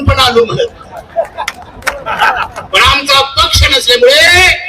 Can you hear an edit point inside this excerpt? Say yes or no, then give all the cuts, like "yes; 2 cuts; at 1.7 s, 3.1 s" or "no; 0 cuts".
yes; 1 cut; at 2.1 s